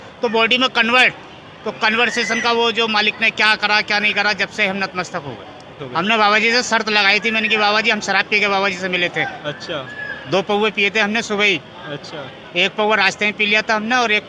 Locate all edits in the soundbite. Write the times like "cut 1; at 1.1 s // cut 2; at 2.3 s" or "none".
cut 1; at 5.8 s